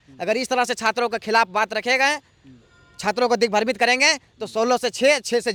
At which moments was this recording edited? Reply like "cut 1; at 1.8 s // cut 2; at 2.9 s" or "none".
none